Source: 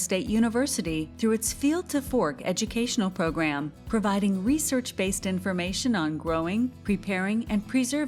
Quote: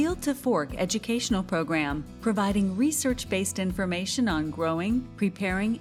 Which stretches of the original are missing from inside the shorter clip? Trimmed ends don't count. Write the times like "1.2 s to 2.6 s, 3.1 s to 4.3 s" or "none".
none